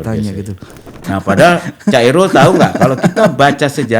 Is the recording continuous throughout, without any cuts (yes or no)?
no